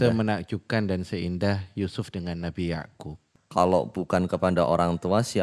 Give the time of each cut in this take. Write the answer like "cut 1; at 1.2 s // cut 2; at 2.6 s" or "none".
cut 1; at 3.2 s